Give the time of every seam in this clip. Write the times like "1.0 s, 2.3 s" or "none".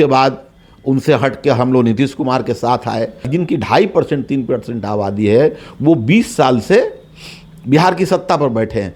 3.3 s